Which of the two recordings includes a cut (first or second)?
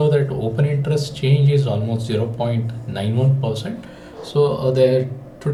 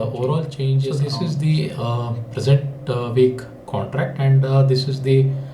second